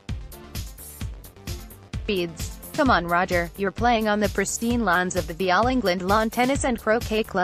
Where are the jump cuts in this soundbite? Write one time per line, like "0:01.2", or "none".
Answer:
0:01.4